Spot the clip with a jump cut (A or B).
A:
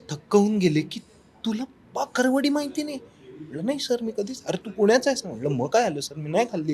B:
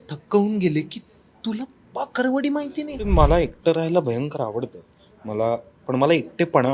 B